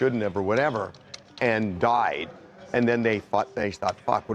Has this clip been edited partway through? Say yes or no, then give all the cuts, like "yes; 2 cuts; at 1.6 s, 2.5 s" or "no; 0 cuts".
no; 0 cuts